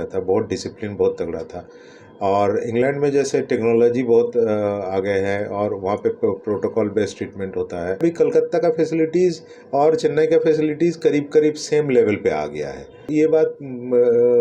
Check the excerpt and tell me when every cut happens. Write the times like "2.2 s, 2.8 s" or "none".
8.0 s, 13.1 s